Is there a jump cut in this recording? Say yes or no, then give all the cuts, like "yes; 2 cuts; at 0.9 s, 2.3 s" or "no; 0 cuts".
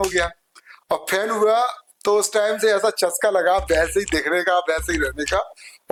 no; 0 cuts